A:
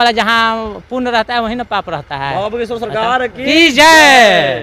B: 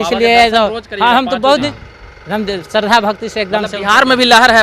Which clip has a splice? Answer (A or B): B